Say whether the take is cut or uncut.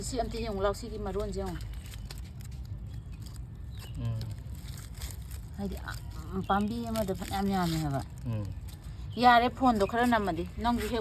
uncut